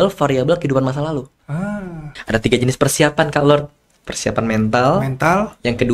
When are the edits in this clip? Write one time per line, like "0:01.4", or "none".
0:02.2